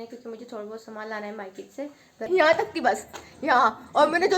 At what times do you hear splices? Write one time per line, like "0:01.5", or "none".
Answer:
0:02.3